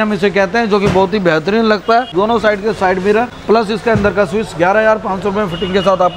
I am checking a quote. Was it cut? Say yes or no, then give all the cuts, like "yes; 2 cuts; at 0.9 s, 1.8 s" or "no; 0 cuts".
yes; 2 cuts; at 2.1 s, 3.3 s